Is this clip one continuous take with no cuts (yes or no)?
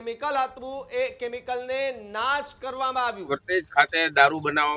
no